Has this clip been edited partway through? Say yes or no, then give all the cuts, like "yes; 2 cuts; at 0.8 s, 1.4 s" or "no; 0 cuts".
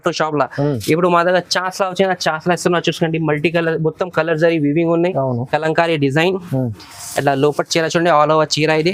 no; 0 cuts